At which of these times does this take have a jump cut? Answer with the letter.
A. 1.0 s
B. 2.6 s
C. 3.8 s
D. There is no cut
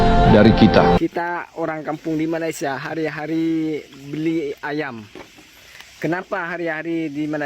A